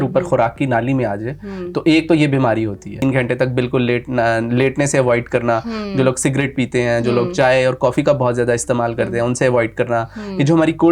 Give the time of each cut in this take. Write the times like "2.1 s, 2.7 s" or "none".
3.0 s